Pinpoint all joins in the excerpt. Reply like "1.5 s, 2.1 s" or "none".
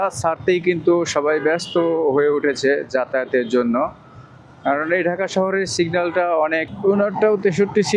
6.7 s